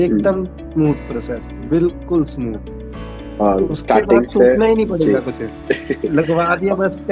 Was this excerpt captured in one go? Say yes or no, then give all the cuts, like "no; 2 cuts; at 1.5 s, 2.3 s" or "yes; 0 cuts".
yes; 0 cuts